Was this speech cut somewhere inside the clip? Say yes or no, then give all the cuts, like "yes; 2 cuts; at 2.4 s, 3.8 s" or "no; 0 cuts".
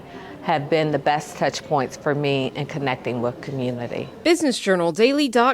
yes; 1 cut; at 4.1 s